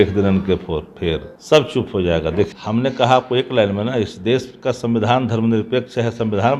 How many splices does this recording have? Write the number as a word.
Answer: two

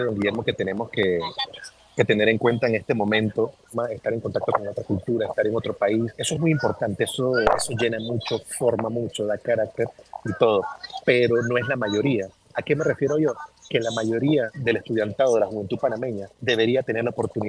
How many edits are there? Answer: five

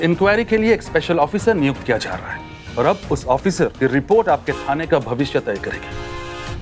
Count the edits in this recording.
one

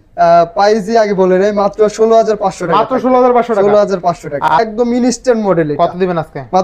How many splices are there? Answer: one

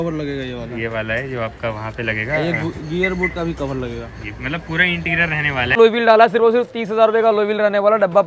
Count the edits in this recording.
one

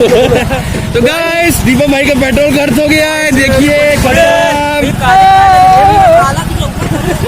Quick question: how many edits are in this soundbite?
zero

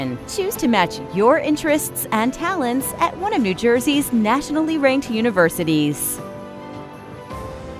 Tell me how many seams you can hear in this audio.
one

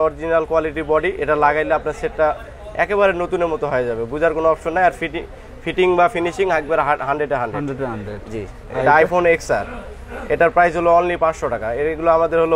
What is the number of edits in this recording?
zero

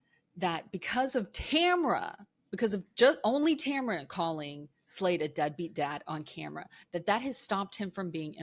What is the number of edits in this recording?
zero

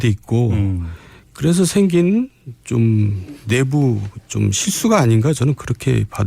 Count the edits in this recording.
one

